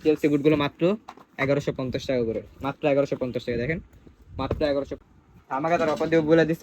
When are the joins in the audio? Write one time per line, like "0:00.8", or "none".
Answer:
0:04.9